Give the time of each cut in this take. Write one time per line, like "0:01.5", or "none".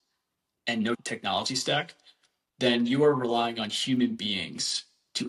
0:01.0